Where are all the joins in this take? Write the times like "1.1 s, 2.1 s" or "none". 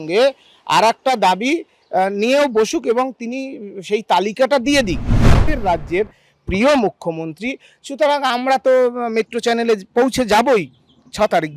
5.5 s